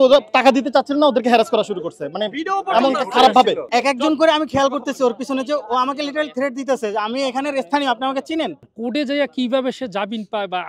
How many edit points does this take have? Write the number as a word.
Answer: two